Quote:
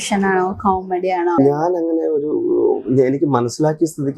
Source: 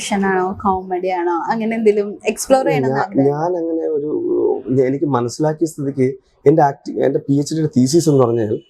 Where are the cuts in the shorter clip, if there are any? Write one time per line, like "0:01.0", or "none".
0:01.4